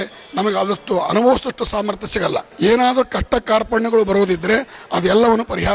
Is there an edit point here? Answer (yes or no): yes